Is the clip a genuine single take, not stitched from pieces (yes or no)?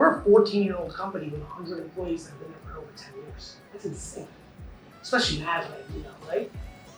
yes